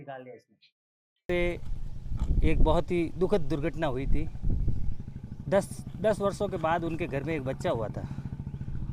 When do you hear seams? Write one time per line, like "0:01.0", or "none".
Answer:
0:01.3